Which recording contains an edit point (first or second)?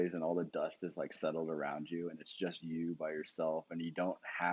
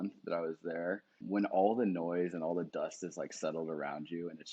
second